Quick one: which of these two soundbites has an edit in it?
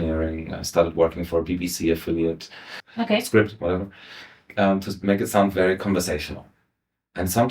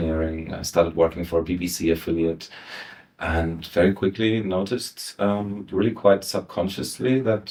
first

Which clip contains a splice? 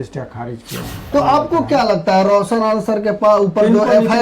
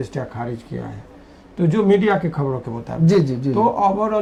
first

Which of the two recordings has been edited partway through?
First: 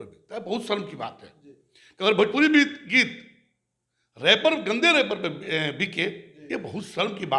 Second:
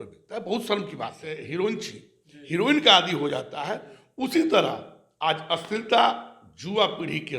second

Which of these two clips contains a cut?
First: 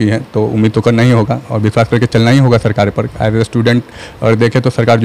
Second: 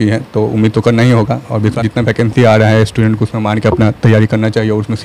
second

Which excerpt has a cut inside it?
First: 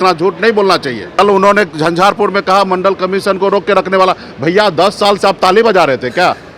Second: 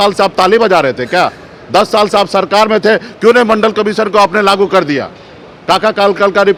first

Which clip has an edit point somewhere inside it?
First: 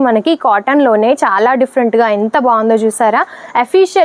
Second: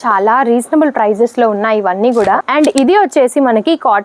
second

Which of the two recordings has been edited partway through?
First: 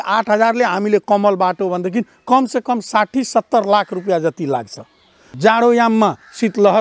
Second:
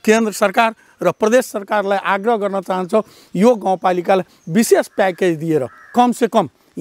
first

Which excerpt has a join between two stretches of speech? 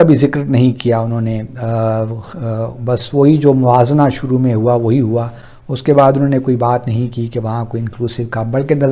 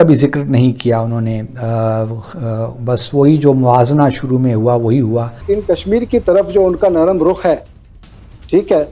second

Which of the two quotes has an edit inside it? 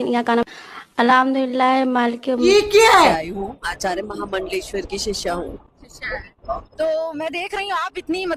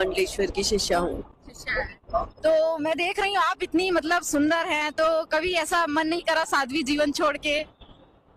first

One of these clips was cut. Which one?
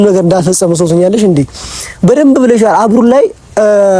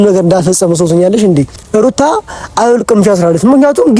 second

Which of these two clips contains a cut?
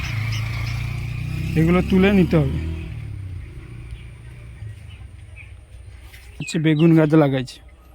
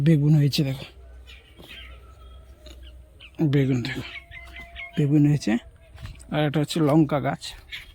first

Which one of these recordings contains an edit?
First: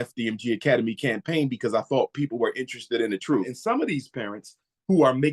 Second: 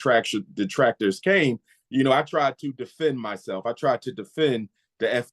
first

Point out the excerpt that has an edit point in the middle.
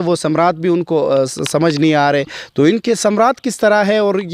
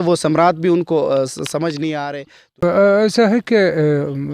second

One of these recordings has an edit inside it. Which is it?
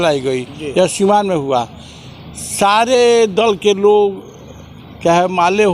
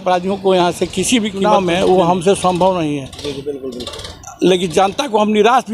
second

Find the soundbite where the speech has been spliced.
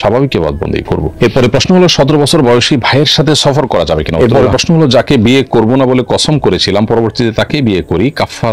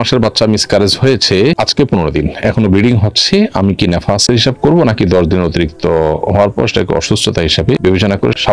first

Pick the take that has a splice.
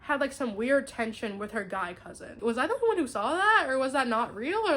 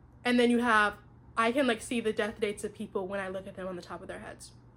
first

